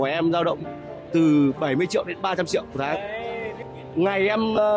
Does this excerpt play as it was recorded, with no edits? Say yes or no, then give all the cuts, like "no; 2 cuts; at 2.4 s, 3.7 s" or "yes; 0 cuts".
no; 1 cut; at 3.5 s